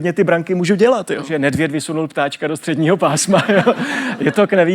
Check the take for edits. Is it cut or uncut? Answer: cut